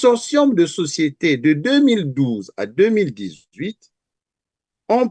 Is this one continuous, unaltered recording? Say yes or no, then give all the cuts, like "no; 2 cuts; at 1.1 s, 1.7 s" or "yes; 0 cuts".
yes; 0 cuts